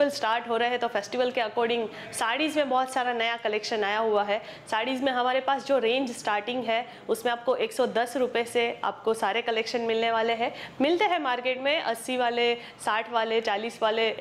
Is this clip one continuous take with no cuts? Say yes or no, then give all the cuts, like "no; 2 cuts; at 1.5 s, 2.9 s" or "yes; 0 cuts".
yes; 0 cuts